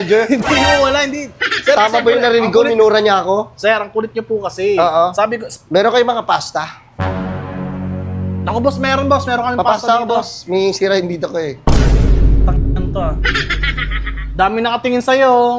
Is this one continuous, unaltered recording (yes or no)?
no